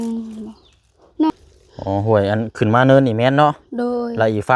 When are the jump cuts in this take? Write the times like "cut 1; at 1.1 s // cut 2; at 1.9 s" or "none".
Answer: cut 1; at 1.3 s